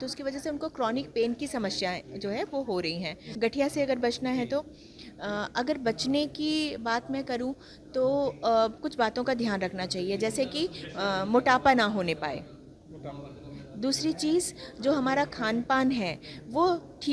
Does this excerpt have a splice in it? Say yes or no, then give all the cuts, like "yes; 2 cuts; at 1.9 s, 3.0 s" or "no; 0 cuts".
yes; 1 cut; at 3.2 s